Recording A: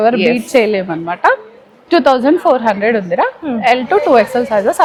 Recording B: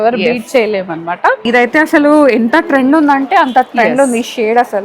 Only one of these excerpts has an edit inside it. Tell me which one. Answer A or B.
B